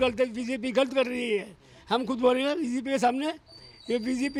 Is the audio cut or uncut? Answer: uncut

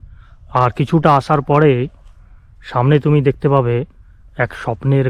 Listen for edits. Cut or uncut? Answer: uncut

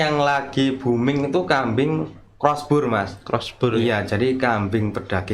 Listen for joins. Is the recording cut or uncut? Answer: uncut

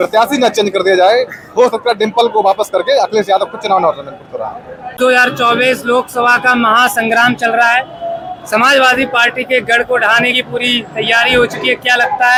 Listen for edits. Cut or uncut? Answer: uncut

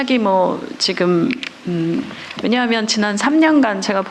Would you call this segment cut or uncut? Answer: uncut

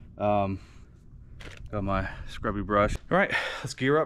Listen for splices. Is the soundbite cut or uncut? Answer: cut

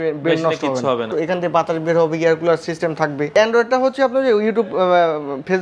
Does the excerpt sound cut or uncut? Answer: cut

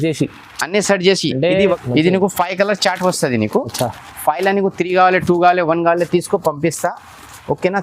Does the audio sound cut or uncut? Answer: cut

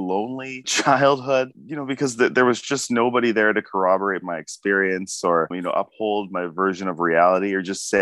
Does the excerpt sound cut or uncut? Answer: uncut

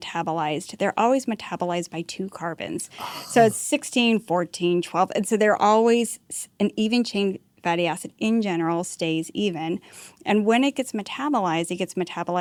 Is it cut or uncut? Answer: uncut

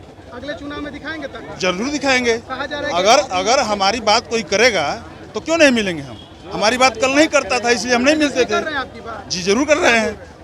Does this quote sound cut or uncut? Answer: uncut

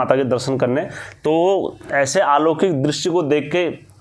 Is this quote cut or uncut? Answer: uncut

